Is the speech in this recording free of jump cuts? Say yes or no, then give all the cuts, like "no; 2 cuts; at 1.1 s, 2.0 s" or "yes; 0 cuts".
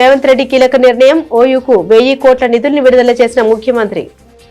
yes; 0 cuts